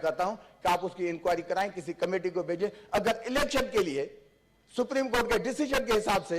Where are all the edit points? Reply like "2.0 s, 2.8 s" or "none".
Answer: none